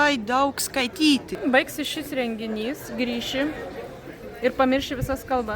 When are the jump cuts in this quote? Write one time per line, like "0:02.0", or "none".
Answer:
0:01.4